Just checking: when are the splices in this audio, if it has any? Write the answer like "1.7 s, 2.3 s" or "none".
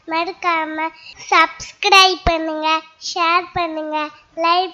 none